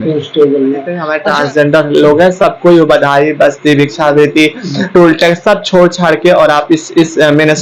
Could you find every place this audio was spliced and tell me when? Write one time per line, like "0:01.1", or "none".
0:01.1